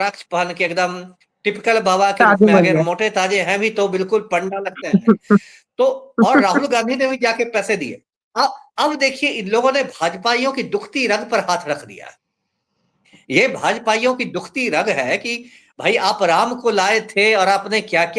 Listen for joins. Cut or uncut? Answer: uncut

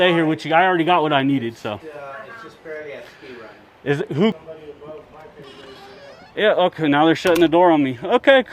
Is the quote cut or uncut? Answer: cut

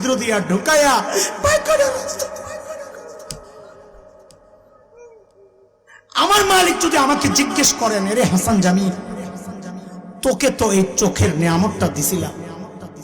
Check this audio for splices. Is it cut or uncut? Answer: cut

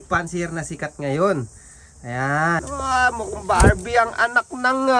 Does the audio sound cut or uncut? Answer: cut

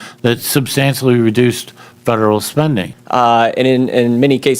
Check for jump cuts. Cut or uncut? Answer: cut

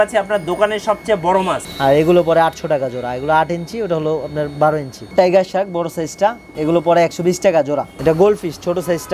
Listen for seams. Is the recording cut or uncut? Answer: cut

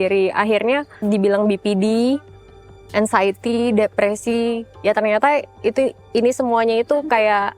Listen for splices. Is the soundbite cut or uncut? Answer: cut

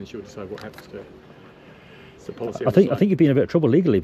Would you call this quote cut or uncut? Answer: uncut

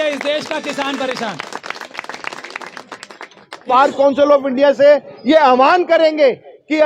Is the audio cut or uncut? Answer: cut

